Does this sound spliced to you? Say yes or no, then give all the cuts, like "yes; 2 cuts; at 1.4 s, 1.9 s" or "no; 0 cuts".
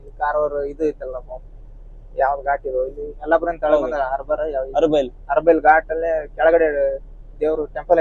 no; 0 cuts